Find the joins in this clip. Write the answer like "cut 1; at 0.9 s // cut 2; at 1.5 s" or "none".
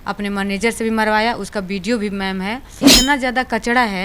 cut 1; at 2.9 s